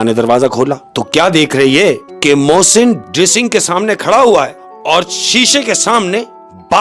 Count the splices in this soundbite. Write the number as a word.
four